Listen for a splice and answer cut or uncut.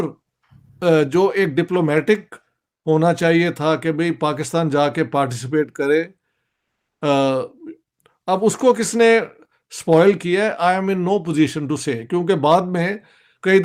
uncut